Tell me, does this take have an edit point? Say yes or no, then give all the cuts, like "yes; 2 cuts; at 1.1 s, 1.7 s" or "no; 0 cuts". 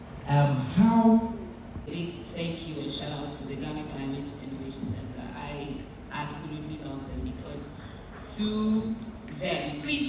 yes; 1 cut; at 1.8 s